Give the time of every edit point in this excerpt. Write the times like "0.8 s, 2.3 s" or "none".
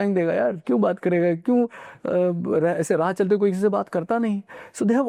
none